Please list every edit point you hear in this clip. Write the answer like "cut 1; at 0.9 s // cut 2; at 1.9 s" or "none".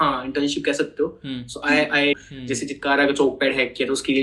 cut 1; at 2.2 s